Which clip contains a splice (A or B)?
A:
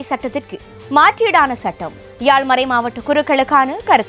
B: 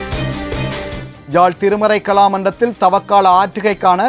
B